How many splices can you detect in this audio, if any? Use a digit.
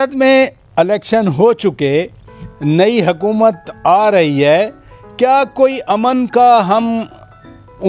0